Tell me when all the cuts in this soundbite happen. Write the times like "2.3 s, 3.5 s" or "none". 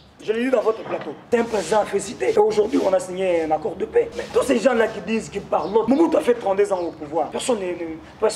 1.2 s, 2.3 s, 4.2 s, 5.9 s, 7.4 s